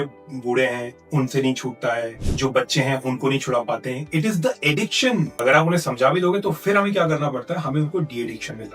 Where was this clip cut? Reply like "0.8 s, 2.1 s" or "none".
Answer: 2.2 s, 5.3 s